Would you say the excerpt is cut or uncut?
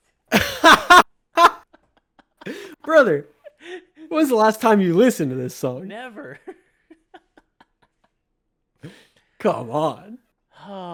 uncut